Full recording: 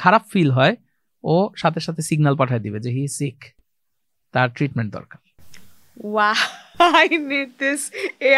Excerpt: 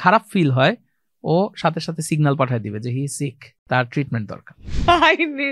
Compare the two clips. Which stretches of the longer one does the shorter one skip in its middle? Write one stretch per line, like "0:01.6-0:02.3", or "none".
0:03.5-0:04.1
0:05.3-0:06.6